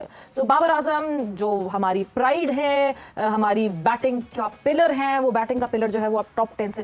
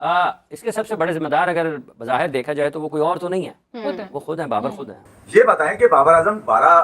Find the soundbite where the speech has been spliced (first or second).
second